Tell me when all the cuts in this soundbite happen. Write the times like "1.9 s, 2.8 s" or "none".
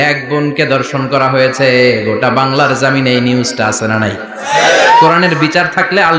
none